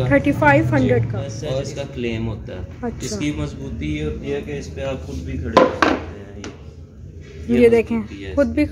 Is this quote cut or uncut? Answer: cut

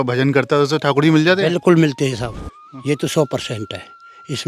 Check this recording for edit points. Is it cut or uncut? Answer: uncut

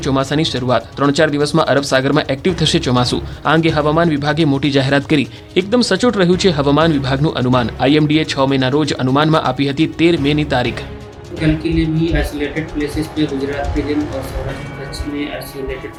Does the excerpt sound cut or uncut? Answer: uncut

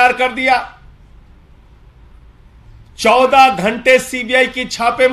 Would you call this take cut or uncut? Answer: uncut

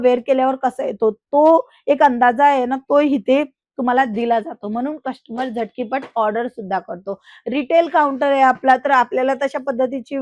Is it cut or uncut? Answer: uncut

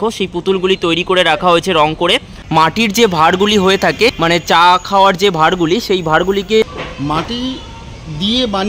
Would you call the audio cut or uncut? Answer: cut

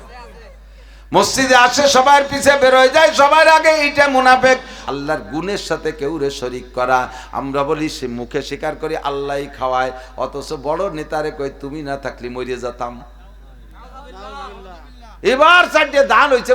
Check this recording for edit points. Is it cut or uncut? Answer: cut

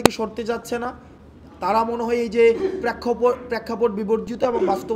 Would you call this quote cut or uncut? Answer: uncut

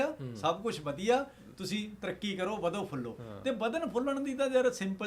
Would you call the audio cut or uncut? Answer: uncut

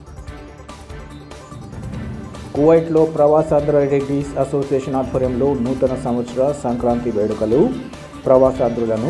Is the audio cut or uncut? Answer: cut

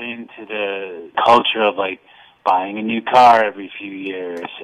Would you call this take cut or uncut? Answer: cut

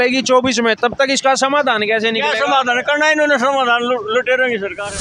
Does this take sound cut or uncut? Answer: uncut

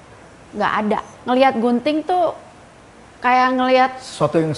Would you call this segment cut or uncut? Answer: cut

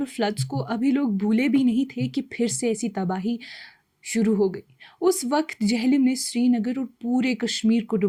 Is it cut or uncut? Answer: uncut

